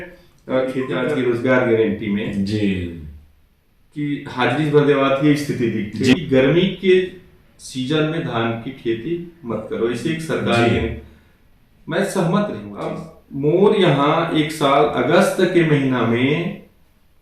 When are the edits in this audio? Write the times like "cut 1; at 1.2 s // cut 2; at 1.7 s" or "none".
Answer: cut 1; at 0.9 s // cut 2; at 6.1 s // cut 3; at 12.7 s